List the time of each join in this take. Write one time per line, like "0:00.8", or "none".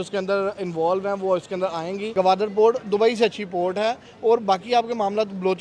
0:02.1